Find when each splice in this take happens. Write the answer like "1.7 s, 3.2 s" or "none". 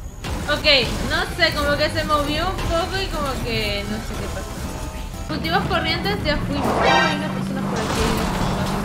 5.3 s

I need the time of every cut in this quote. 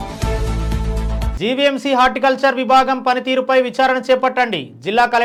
none

